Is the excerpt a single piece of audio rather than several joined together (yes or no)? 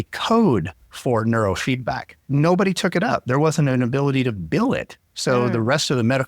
no